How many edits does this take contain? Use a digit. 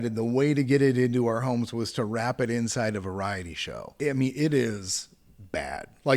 1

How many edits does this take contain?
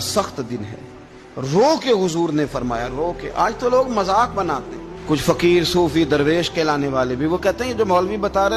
0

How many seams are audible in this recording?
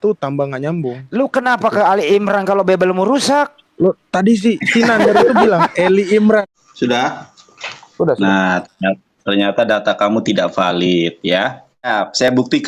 2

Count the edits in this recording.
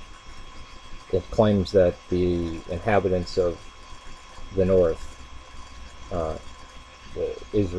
1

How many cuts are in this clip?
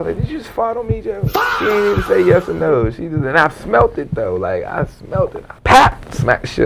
2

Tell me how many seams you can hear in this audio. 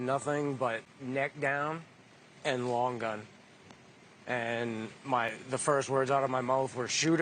1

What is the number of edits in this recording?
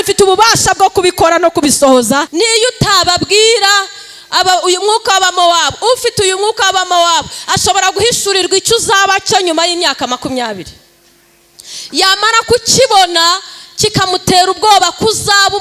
1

